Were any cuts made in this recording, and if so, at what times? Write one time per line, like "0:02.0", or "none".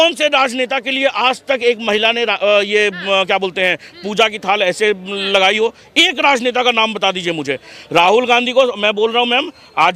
none

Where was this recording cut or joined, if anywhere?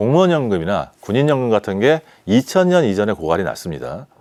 none

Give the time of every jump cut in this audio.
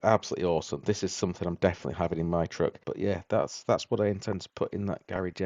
0:02.9

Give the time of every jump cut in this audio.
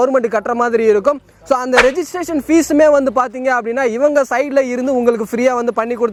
none

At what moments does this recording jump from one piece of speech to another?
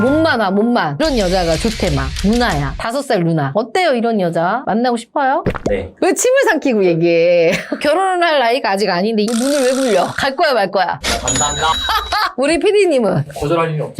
0:01.0
0:03.5
0:09.3

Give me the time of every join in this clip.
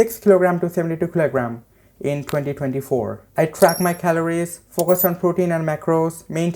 0:03.2

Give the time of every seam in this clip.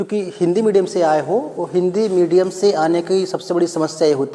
none

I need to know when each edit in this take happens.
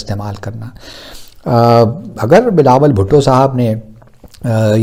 none

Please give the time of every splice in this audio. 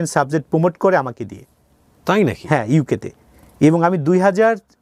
none

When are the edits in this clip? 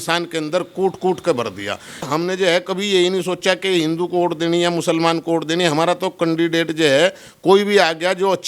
0:02.1

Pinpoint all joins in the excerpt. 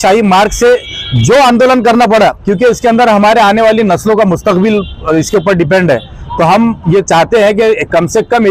none

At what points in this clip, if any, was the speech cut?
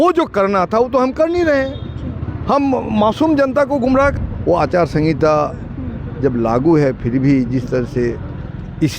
0:04.2

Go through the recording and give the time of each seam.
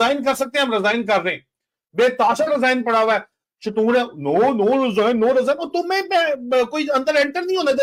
none

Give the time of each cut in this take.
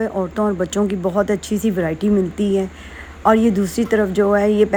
none

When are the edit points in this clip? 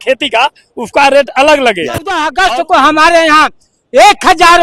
0:02.3

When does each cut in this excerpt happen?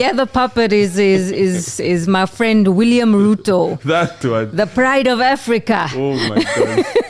none

